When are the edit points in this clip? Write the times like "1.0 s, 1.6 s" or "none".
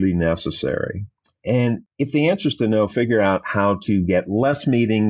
1.9 s